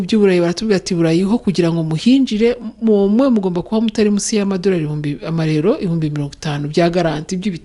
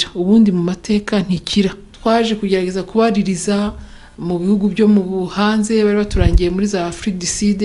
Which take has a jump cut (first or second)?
second